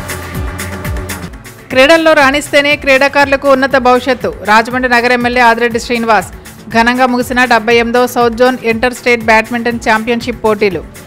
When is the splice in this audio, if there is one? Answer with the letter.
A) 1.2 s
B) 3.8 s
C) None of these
A